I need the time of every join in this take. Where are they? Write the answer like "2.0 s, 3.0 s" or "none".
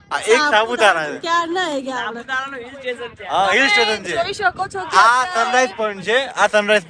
none